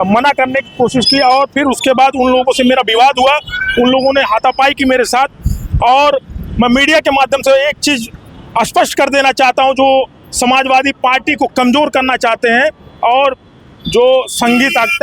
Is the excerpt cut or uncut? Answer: uncut